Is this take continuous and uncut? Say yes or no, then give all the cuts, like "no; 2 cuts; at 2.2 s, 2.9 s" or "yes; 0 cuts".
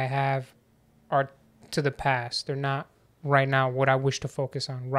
yes; 0 cuts